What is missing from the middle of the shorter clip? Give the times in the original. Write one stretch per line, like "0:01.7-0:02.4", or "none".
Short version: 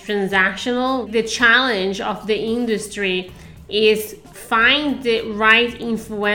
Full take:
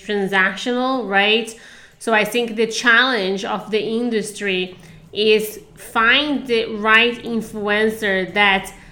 0:01.1-0:02.5